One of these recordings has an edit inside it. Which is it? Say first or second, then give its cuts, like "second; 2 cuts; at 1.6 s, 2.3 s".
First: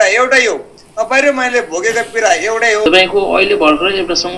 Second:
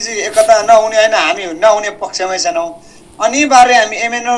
first; 1 cut; at 2.9 s